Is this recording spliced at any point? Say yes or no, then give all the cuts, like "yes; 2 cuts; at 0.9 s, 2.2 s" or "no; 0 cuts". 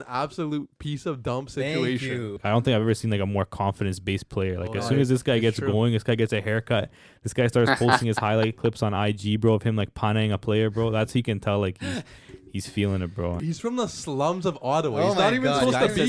yes; 2 cuts; at 2.4 s, 13.4 s